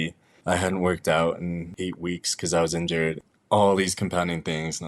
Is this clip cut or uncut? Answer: cut